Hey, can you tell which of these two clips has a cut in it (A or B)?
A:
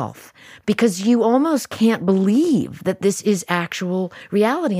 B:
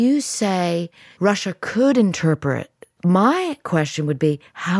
B